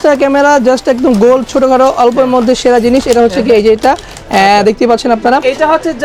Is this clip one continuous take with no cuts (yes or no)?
yes